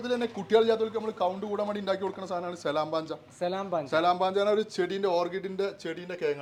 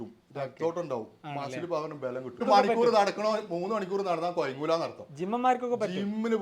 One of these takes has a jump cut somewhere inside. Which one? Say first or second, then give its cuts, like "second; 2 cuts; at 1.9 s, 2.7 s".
second; 1 cut; at 2.4 s